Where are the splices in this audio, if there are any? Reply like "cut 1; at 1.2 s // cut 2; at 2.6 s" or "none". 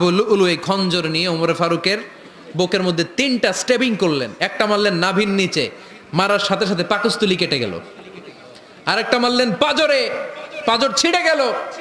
none